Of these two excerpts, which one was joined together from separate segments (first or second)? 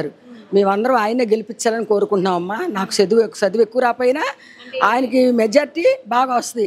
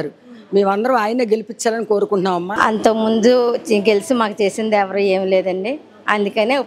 second